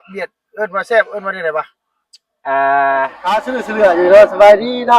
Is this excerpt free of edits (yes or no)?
no